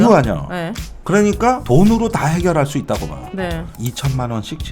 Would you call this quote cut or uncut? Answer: cut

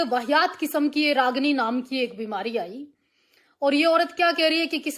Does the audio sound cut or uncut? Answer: uncut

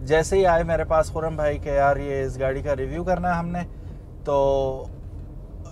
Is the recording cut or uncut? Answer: uncut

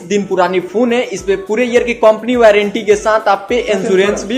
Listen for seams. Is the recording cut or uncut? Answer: uncut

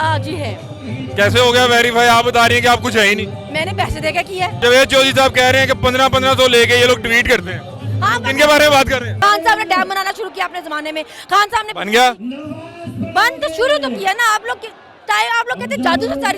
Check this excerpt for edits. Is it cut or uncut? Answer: cut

